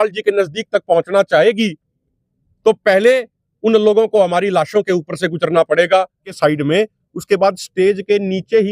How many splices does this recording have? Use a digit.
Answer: 1